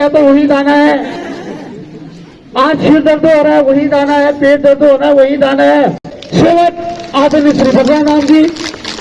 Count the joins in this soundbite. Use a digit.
1